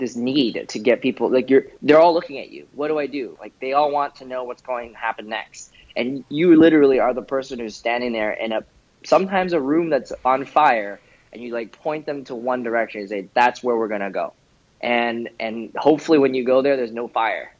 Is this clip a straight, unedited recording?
no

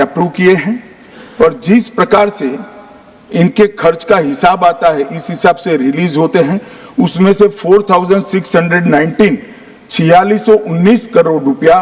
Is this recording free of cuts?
yes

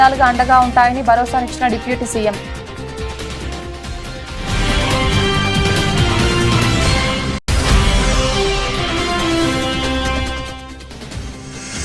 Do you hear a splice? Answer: yes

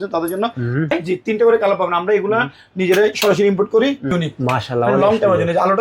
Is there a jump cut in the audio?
yes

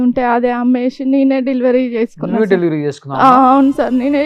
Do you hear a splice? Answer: no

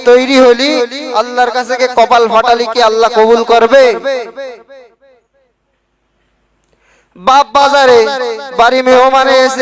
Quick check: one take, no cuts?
yes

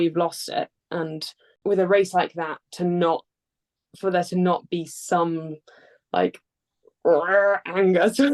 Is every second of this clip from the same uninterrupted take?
no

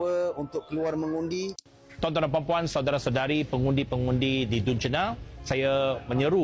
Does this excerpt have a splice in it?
yes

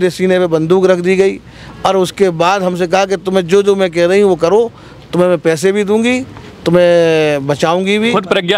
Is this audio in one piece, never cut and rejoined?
yes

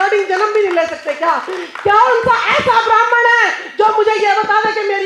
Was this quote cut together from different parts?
no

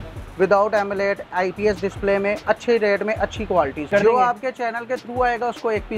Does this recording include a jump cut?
yes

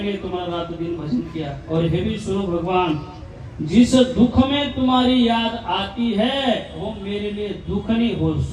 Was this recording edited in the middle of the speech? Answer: no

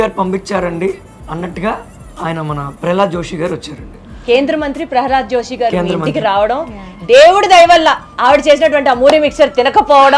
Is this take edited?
no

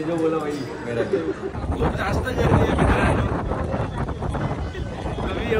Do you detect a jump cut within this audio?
yes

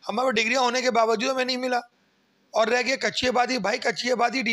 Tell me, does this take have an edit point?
no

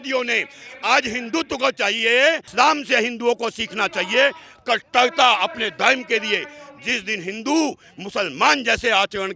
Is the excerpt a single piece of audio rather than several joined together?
no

